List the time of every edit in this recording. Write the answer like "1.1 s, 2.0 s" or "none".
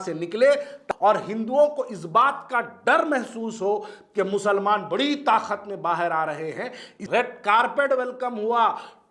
0.8 s, 7.0 s

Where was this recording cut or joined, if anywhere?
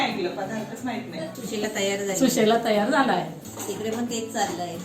1.3 s, 3.4 s

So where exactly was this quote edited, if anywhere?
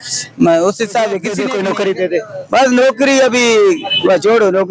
1.4 s

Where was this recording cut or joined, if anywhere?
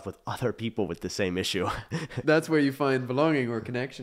2.2 s

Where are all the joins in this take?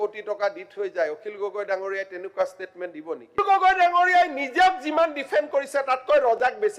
3.4 s

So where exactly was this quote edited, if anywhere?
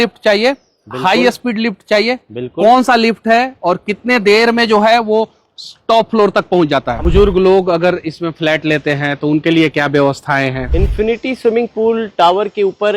7.0 s, 10.6 s

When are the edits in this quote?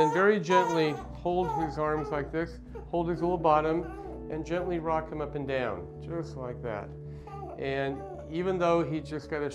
5.1 s

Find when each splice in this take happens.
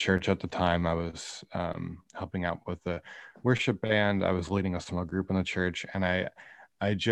none

